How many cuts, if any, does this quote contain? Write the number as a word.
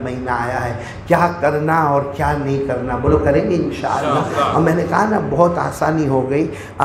zero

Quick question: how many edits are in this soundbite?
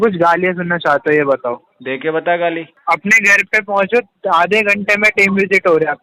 one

